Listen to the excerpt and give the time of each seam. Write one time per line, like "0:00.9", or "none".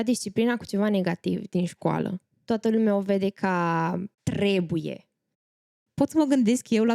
0:02.3
0:04.1
0:05.5